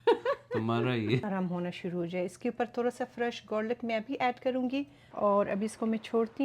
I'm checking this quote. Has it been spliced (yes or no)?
yes